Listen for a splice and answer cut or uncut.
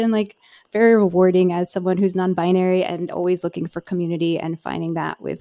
uncut